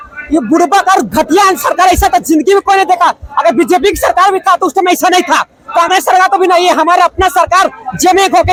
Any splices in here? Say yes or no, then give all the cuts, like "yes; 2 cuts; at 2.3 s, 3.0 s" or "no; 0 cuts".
no; 0 cuts